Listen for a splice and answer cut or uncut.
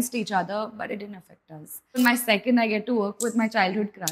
cut